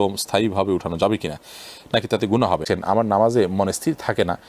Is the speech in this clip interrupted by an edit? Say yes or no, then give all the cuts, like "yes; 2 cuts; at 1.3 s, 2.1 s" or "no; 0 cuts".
yes; 1 cut; at 2.6 s